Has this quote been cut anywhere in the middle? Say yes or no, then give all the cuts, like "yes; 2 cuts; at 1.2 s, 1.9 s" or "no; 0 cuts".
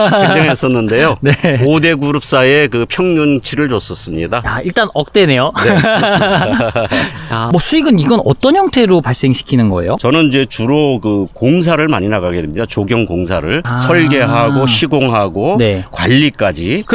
yes; 3 cuts; at 4.5 s, 7.4 s, 10.0 s